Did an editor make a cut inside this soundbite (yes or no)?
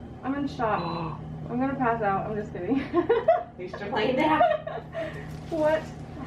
no